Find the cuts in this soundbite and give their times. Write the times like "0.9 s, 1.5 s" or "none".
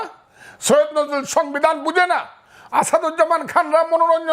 none